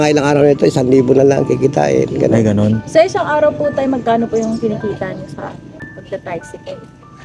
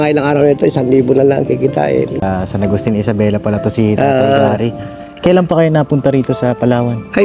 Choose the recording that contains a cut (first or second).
second